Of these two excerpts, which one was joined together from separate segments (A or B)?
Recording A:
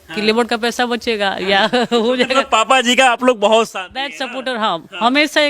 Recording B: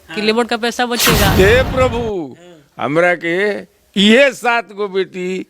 B